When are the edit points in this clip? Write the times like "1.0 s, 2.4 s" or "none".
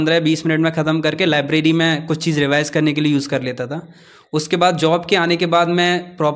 none